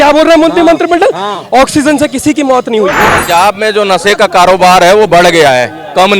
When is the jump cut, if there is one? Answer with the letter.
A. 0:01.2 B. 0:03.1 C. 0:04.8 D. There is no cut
B